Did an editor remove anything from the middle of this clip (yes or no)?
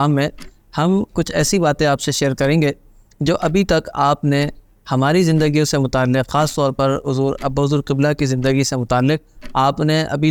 no